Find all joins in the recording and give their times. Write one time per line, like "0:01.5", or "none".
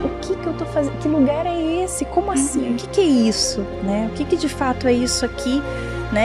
none